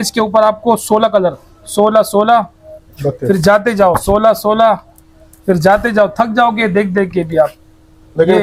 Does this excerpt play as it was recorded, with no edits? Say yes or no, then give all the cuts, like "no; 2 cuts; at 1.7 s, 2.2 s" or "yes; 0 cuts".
yes; 0 cuts